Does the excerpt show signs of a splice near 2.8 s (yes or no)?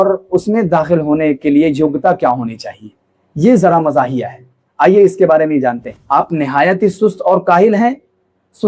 no